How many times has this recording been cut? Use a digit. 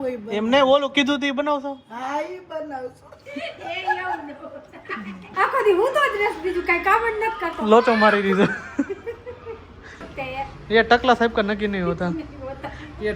2